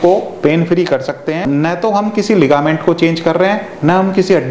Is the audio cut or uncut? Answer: cut